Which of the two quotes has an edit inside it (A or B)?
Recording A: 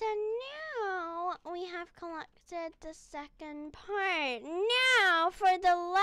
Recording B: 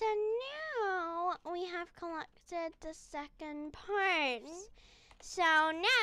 B